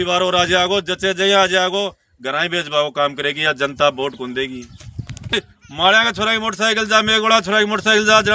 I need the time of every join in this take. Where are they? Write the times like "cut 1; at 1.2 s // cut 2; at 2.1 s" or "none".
cut 1; at 5.3 s